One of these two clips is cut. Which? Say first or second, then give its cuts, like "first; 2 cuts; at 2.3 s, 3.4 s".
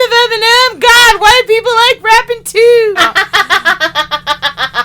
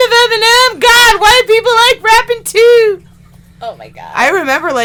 first; 1 cut; at 3.0 s